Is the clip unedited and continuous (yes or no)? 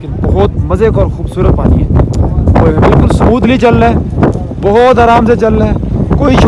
yes